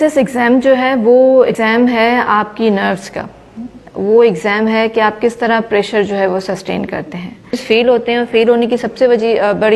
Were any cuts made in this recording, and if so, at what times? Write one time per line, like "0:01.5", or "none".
0:01.5
0:07.6